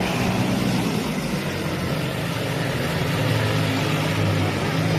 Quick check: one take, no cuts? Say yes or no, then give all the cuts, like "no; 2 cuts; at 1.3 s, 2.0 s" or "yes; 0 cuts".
yes; 0 cuts